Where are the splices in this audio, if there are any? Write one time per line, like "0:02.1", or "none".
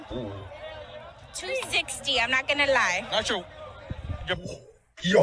0:03.1

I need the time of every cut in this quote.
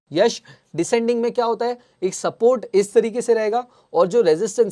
none

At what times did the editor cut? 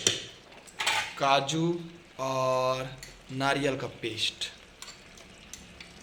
none

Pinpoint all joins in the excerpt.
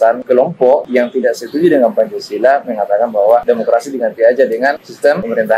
none

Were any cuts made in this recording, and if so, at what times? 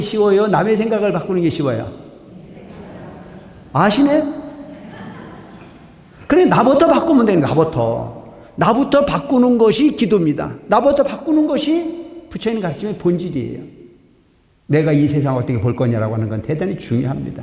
none

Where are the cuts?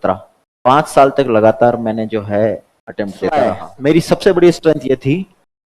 0:03.7

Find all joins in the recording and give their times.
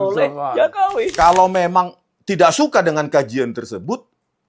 0:01.1

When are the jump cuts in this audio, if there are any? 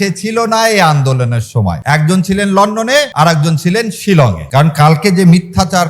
0:01.8
0:03.1
0:04.4

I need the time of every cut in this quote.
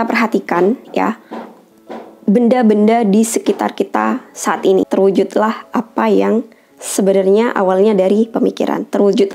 0:04.9

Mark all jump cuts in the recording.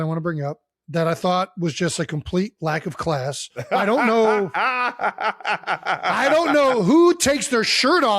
none

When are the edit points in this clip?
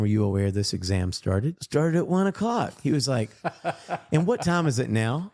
0:01.6

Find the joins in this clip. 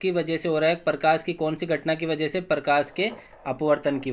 none

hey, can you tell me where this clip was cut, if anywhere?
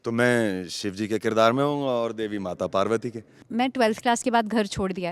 0:03.4

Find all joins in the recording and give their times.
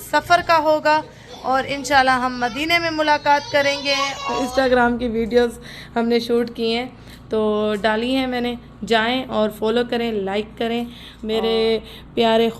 0:04.1
0:11.3

